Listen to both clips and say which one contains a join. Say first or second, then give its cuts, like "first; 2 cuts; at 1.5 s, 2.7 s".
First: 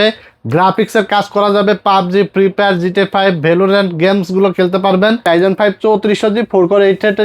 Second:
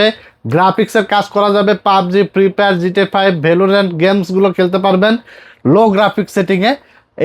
first; 1 cut; at 5.3 s